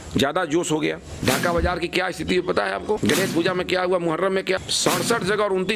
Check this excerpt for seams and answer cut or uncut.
cut